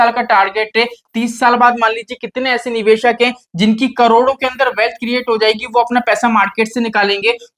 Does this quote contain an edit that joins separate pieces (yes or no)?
no